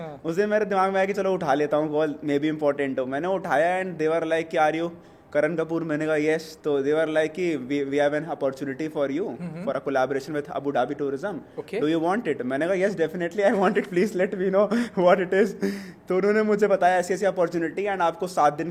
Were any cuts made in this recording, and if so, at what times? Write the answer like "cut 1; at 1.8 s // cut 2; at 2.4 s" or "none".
none